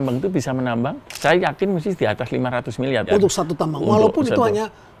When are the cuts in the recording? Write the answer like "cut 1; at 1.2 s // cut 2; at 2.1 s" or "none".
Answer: cut 1; at 1.1 s // cut 2; at 3.0 s

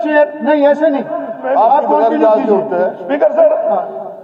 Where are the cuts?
cut 1; at 1.4 s

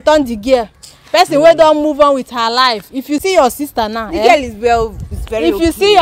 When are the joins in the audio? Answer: cut 1; at 3.2 s

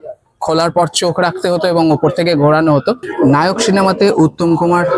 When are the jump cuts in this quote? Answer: cut 1; at 3.1 s

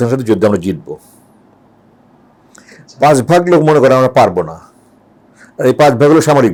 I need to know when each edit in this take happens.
none

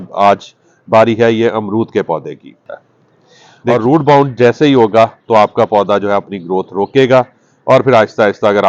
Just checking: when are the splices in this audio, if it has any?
cut 1; at 3.7 s

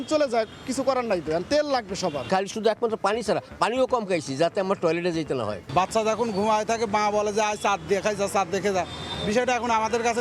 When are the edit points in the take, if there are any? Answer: cut 1; at 2.2 s // cut 2; at 5.6 s

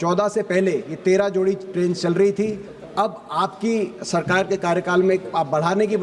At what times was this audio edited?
none

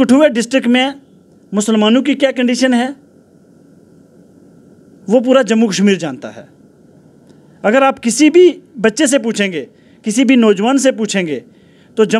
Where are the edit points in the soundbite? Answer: none

